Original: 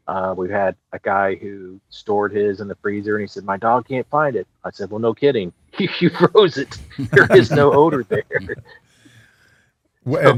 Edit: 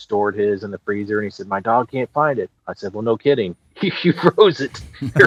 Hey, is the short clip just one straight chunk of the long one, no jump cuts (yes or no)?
yes